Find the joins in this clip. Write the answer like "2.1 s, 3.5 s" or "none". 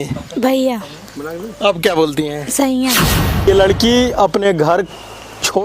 3.5 s